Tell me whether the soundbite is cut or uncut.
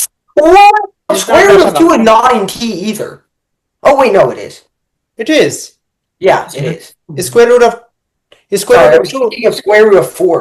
cut